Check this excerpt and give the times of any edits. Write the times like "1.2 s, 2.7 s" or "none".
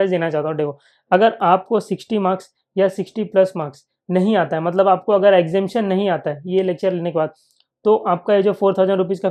none